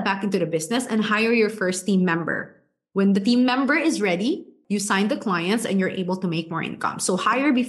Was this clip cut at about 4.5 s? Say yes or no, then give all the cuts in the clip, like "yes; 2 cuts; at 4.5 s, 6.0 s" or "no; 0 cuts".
yes; 1 cut; at 4.5 s